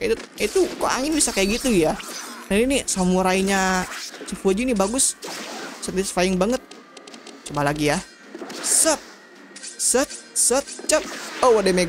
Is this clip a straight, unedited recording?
yes; 0 cuts

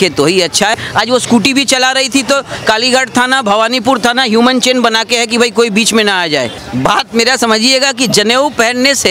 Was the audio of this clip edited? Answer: yes; 2 cuts; at 0.8 s, 6.6 s

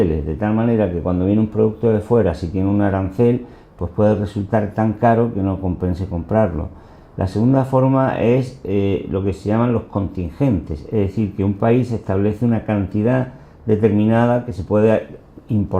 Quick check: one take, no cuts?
yes; 0 cuts

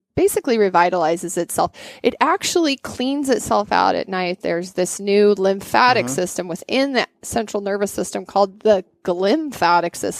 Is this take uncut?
yes; 0 cuts

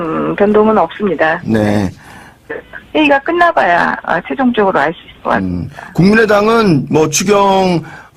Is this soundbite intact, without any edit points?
yes; 0 cuts

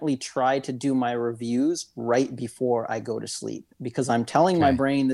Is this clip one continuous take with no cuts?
yes; 0 cuts

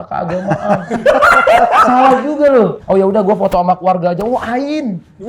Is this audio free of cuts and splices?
no; 1 cut; at 2.8 s

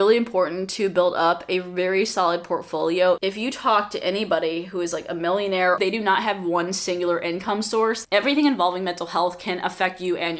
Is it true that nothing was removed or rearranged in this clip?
no; 3 cuts; at 3.2 s, 5.8 s, 8.0 s

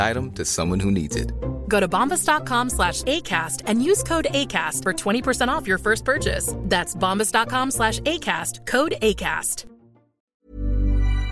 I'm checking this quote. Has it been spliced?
yes; 1 cut; at 10.3 s

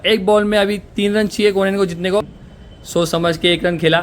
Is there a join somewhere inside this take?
yes; 1 cut; at 2.4 s

